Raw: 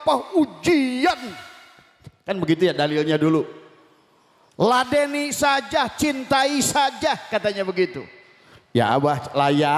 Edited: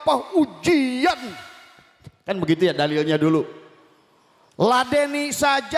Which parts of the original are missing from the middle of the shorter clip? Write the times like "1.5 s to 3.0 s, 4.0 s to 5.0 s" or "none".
none